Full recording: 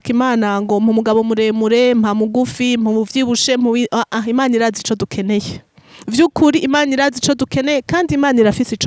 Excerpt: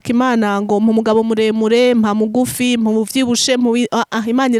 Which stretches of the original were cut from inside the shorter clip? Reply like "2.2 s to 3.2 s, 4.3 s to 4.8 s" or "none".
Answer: none